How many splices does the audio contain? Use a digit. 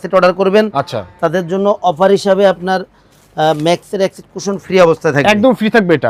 0